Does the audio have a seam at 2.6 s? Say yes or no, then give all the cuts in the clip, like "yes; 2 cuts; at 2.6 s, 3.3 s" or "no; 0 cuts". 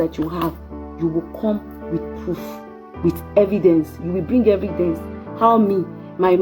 yes; 1 cut; at 2.6 s